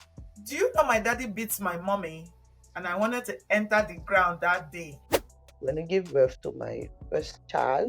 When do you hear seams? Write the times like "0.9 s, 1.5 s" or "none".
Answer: 5.1 s